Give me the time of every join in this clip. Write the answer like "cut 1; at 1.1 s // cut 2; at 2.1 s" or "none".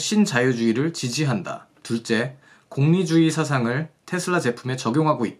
none